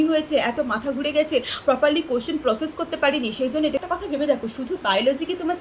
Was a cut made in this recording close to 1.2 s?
no; 1 cut; at 3.8 s

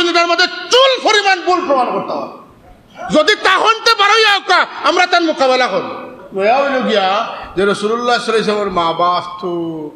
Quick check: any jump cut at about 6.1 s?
yes; 1 cut; at 6.1 s

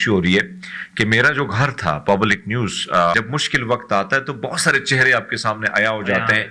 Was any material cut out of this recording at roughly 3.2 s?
yes; 1 cut; at 3.2 s

